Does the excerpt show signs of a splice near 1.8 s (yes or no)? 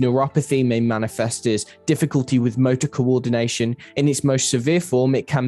no